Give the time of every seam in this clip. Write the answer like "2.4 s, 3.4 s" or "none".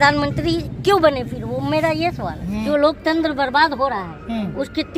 2.6 s